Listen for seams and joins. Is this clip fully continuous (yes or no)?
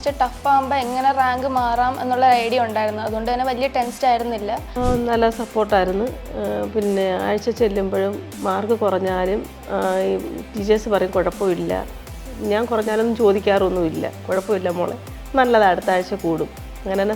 no